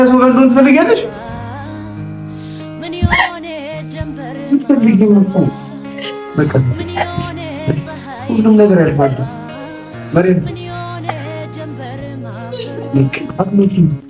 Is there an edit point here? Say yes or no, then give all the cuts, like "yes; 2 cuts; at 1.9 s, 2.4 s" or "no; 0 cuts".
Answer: no; 0 cuts